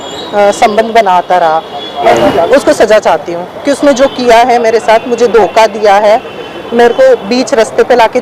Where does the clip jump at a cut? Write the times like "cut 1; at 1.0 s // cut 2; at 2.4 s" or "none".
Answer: cut 1; at 2.1 s

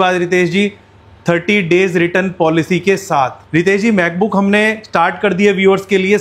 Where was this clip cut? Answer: cut 1; at 3.4 s

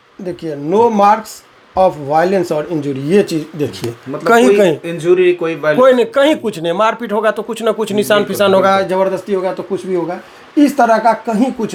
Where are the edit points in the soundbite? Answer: none

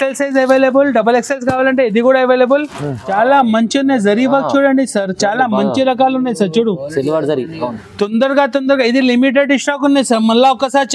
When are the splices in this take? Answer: cut 1; at 3.0 s

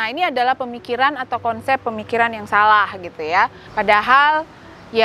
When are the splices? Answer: cut 1; at 3.6 s

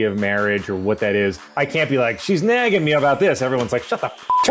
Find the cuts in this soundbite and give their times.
cut 1; at 1.5 s

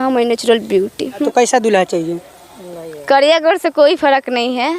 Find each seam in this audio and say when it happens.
cut 1; at 1.2 s

